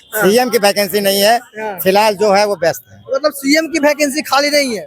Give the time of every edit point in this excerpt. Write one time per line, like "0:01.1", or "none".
none